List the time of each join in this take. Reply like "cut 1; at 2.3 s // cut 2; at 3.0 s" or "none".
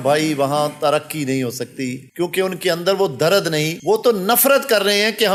none